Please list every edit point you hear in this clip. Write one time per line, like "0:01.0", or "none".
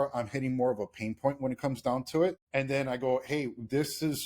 0:02.4